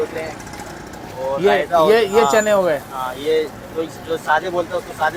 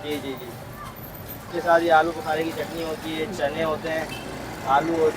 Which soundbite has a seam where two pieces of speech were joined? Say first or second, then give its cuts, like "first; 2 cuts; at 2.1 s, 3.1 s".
second; 1 cut; at 1.5 s